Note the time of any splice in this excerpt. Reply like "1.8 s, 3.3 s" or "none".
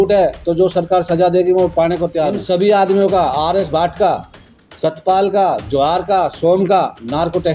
2.4 s